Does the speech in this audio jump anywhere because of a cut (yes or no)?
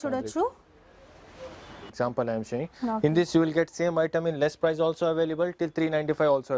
yes